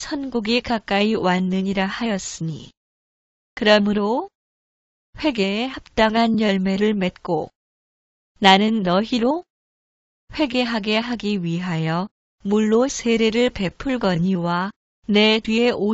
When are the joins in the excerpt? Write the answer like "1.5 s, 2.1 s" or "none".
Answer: 1.9 s